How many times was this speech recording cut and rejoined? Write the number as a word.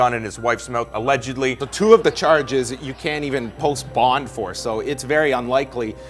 zero